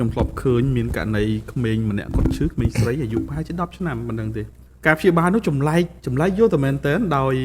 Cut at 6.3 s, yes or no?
no